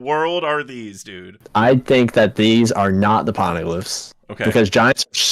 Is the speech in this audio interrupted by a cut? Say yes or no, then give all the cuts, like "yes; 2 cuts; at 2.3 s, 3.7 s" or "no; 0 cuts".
yes; 1 cut; at 1.3 s